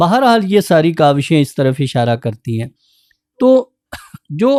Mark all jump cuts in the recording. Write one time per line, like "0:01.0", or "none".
none